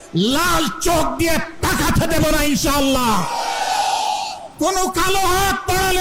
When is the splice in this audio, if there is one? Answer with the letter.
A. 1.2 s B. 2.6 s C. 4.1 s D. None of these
C